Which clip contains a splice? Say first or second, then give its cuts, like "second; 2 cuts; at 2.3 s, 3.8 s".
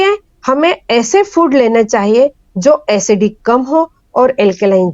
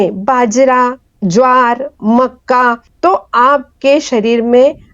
second; 2 cuts; at 1.1 s, 2.9 s